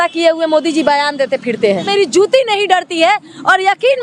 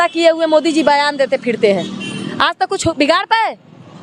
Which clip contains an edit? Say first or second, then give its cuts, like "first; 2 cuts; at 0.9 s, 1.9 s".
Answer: first; 1 cut; at 1.9 s